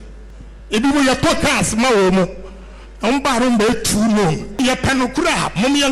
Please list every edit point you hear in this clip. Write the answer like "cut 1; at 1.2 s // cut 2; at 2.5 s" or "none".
cut 1; at 4.6 s